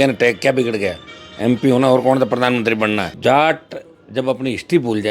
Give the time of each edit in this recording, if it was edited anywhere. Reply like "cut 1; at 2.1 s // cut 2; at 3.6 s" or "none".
cut 1; at 3.1 s

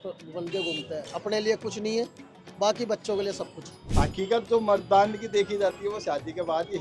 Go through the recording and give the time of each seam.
cut 1; at 3.9 s

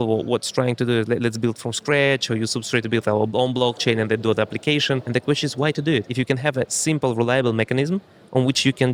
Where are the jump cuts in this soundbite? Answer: cut 1; at 5.0 s // cut 2; at 6.1 s

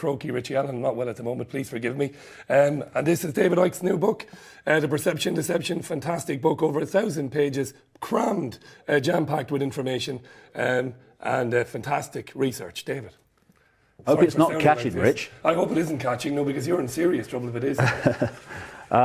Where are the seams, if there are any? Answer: none

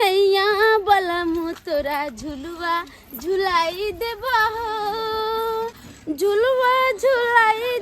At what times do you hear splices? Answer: cut 1; at 5.8 s

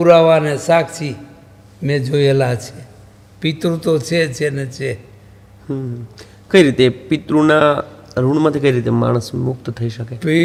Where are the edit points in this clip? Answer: none

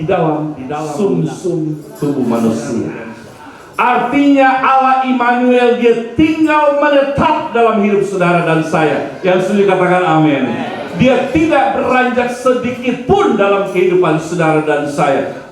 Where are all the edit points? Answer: cut 1; at 1.9 s

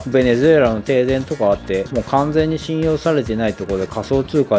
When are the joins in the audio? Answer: none

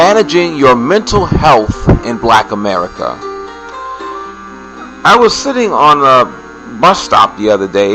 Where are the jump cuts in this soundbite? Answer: none

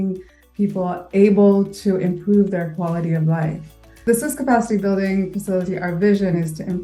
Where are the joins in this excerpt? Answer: cut 1; at 3.9 s

